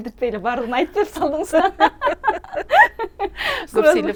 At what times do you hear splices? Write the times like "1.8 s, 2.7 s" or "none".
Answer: none